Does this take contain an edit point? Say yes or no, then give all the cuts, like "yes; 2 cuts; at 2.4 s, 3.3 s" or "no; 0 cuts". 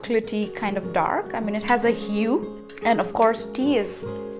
yes; 1 cut; at 2.6 s